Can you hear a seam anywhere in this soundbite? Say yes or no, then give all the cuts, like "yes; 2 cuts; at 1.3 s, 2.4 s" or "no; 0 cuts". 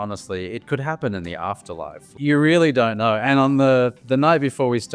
yes; 2 cuts; at 2.1 s, 3.2 s